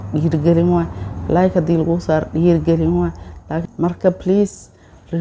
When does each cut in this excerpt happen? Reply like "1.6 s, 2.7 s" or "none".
3.5 s